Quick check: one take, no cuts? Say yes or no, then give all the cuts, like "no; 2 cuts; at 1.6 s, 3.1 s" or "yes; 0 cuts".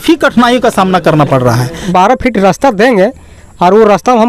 no; 1 cut; at 1.9 s